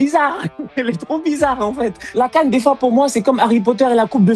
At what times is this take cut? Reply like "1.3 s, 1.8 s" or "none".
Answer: 2.0 s